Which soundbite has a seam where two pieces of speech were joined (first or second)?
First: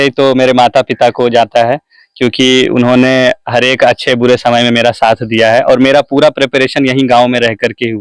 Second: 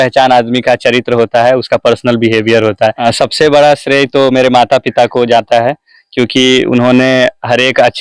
second